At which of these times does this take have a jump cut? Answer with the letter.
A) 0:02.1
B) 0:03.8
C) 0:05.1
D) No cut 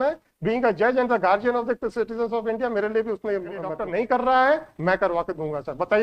B